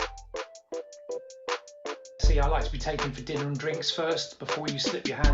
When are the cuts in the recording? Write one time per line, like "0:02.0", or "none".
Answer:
0:03.9